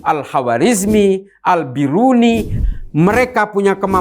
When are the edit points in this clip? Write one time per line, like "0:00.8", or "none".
0:02.5